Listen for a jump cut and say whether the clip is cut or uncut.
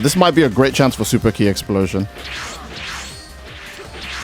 uncut